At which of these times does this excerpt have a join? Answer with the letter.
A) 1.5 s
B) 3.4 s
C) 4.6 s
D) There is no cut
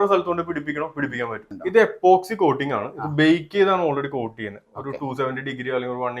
A